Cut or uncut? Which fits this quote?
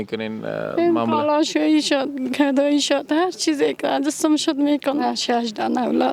cut